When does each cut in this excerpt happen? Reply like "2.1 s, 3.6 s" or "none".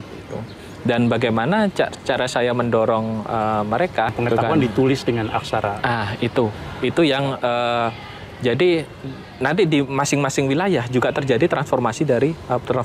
4.1 s